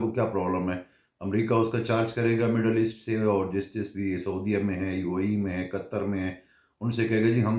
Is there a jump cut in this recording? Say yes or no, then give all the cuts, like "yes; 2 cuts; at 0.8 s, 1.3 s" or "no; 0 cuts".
no; 0 cuts